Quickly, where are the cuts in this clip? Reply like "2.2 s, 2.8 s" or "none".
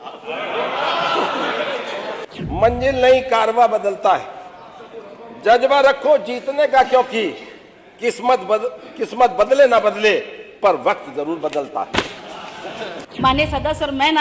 2.2 s, 13.0 s